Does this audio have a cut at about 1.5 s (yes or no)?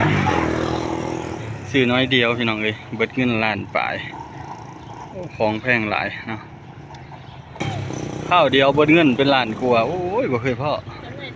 no